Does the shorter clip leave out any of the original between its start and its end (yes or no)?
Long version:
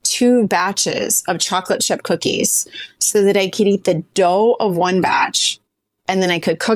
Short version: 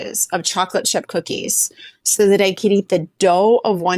no